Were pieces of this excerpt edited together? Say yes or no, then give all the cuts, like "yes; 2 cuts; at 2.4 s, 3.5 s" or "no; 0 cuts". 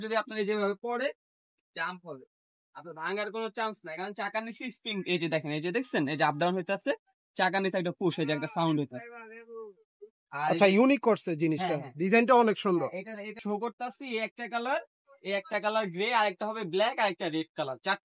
no; 0 cuts